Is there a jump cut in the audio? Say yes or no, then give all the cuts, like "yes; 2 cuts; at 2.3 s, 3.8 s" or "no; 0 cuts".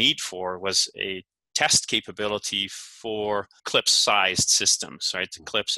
yes; 1 cut; at 3.6 s